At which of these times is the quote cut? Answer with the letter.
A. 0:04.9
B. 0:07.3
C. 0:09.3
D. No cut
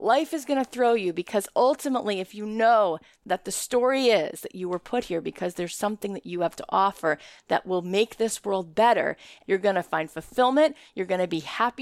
C